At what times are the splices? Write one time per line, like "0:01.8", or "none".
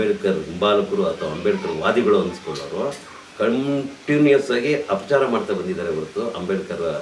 none